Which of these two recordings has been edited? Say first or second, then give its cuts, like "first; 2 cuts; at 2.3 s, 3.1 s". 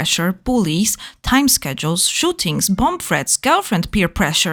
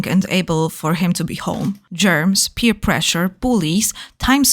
second; 1 cut; at 1.9 s